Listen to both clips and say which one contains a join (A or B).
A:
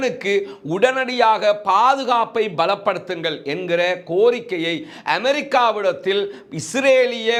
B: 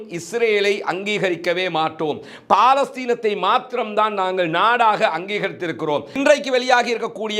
B